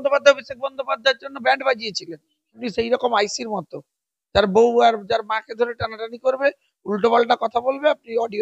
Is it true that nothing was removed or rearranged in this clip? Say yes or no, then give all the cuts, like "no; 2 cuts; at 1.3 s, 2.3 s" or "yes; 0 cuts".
no; 1 cut; at 2.6 s